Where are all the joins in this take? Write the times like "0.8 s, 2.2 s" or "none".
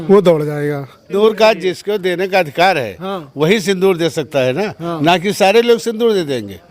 1.1 s

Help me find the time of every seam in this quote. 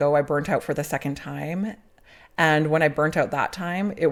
none

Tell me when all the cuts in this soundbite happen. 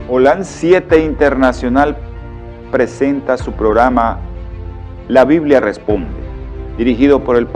3.0 s

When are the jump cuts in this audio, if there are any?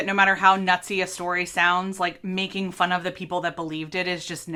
none

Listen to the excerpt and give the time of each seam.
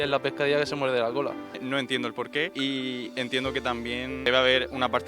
1.5 s, 2.5 s, 4.3 s

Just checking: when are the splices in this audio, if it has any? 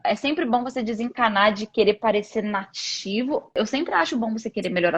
3.5 s

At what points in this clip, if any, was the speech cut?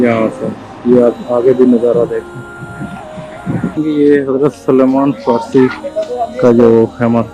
3.8 s

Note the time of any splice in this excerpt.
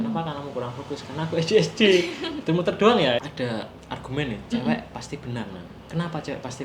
3.2 s

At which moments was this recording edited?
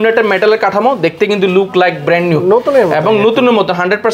none

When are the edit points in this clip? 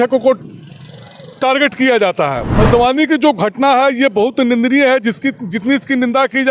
2.5 s

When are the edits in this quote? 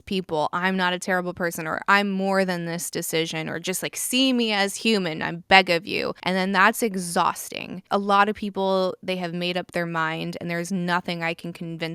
6.2 s, 7.8 s

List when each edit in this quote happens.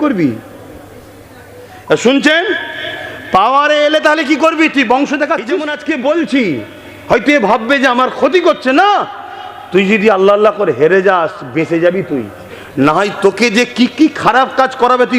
5.7 s

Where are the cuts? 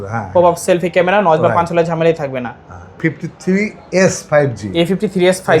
3.0 s

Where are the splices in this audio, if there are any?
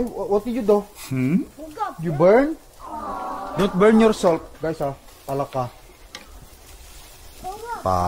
none

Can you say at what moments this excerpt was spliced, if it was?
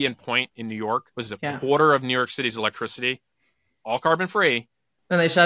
1.1 s

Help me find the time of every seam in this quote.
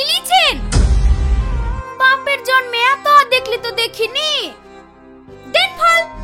none

